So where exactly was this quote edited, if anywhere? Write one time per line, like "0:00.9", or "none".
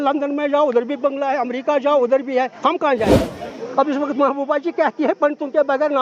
0:03.1